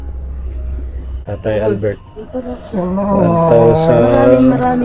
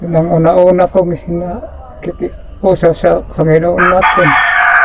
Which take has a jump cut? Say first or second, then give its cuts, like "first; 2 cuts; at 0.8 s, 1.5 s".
first; 1 cut; at 1.1 s